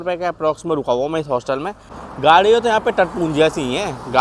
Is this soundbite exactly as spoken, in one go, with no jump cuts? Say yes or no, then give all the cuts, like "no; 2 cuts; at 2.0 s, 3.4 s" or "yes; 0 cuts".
no; 1 cut; at 2.0 s